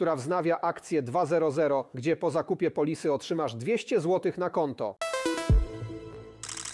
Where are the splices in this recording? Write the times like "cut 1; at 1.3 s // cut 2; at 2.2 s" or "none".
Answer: cut 1; at 5.0 s